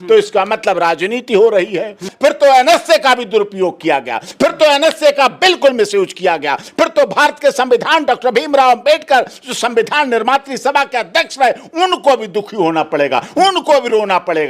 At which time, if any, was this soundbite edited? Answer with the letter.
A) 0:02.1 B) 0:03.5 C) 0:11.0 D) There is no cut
A